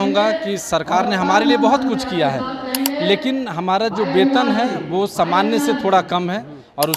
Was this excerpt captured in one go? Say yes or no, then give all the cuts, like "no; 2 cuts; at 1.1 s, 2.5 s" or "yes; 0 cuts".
yes; 0 cuts